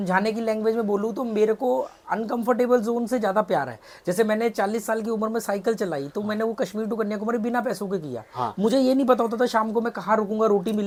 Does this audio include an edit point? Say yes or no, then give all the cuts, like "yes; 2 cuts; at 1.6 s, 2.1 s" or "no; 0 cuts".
no; 0 cuts